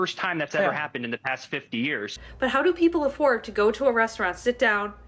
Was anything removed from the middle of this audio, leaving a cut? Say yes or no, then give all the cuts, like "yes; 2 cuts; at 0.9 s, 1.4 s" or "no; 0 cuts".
yes; 1 cut; at 2.1 s